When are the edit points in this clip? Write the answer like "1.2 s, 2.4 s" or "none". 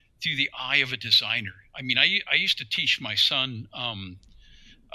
none